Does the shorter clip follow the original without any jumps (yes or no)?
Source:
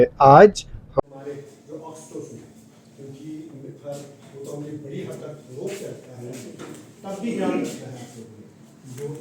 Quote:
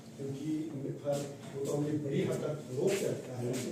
yes